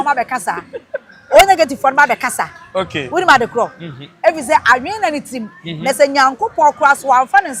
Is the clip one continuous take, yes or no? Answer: yes